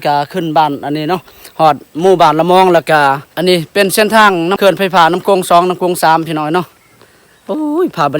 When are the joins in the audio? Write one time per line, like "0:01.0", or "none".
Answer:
0:03.3
0:04.6